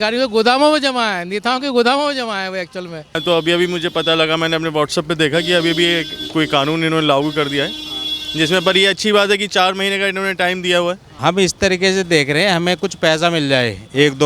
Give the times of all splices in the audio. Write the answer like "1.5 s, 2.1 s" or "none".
3.0 s, 11.1 s